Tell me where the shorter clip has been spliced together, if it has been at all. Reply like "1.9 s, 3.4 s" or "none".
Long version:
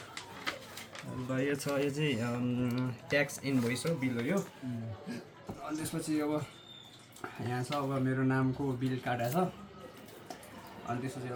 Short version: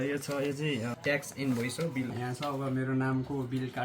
0.9 s, 2.1 s